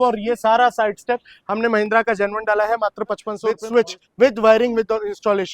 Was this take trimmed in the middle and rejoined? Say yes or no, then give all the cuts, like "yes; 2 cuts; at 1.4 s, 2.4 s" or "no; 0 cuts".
yes; 1 cut; at 3.5 s